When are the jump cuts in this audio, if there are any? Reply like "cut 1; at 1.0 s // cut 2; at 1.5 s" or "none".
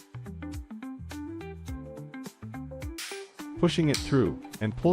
cut 1; at 3.4 s